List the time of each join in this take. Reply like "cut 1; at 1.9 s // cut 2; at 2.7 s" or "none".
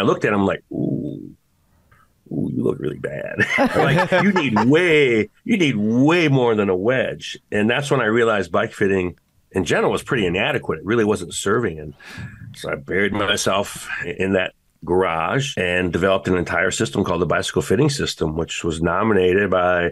cut 1; at 14.1 s // cut 2; at 15.5 s